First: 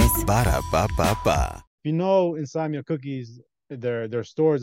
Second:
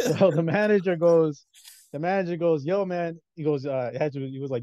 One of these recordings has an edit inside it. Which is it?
first; 1 cut; at 1.7 s

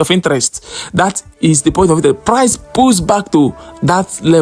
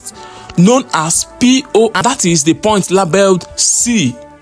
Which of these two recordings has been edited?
second; 1 cut; at 2.0 s

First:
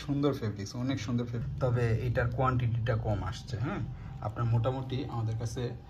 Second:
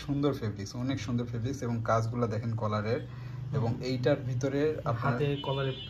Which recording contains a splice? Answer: first; 1 cut; at 1.4 s

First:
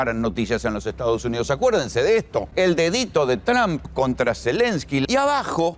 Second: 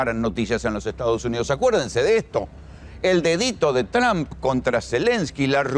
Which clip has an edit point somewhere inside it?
first; 2 cuts; at 2.5 s, 5.0 s

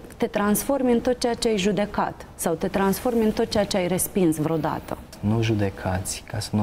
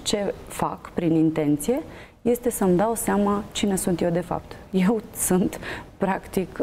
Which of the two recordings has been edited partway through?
first; 1 cut; at 5.1 s

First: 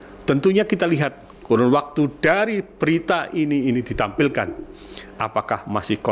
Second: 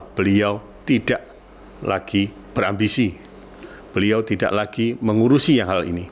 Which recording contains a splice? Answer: second; 1 cut; at 2.4 s

